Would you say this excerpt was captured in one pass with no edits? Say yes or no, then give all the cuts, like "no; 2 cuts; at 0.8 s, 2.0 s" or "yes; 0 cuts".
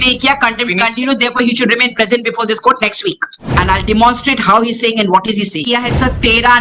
no; 2 cuts; at 3.3 s, 5.6 s